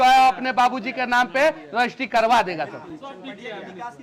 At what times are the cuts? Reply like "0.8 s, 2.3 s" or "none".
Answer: none

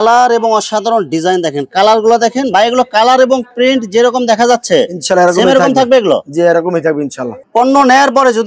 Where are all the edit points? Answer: none

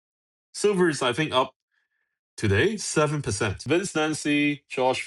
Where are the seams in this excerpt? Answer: 3.6 s

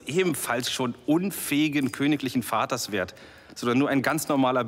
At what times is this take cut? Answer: none

